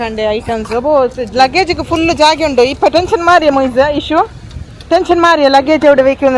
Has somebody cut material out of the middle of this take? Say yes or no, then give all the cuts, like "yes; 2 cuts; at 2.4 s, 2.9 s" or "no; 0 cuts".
no; 0 cuts